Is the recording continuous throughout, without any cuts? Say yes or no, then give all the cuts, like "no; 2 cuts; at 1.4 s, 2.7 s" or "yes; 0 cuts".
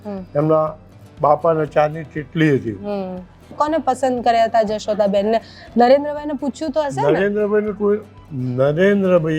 no; 1 cut; at 3.6 s